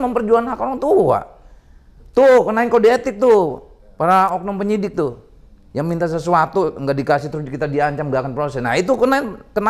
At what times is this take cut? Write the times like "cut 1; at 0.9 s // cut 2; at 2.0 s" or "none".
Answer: none